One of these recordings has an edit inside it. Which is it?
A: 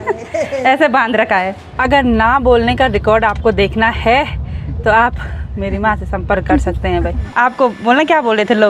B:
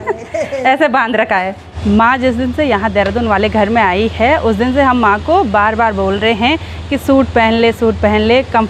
A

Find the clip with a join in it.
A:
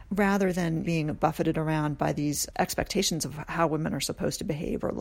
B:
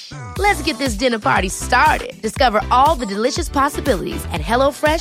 A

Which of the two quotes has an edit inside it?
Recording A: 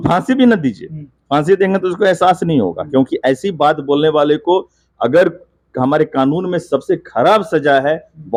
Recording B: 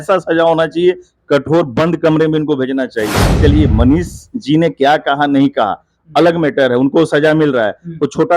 B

